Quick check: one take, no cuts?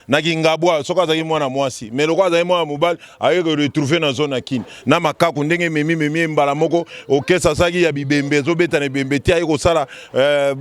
yes; 0 cuts

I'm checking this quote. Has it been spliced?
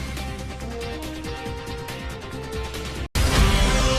yes; 1 cut; at 3.0 s

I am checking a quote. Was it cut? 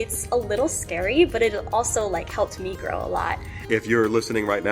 yes; 1 cut; at 3.5 s

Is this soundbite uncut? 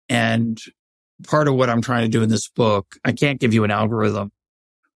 yes; 0 cuts

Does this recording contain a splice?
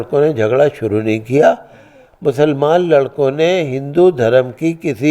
no; 0 cuts

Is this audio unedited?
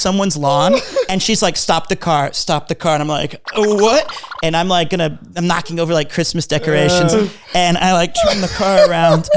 yes; 0 cuts

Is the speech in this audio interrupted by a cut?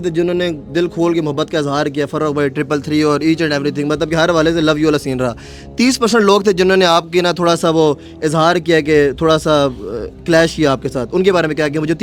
no; 0 cuts

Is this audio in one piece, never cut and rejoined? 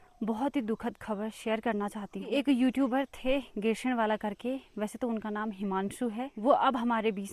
no; 2 cuts; at 2.3 s, 6.3 s

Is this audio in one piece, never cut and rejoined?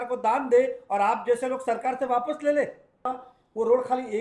no; 1 cut; at 3.1 s

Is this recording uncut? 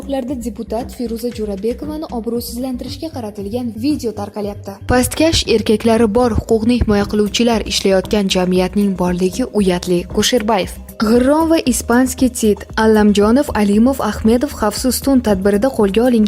no; 2 cuts; at 4.7 s, 10.8 s

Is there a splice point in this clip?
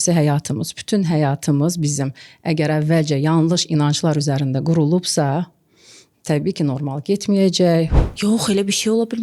yes; 1 cut; at 8.0 s

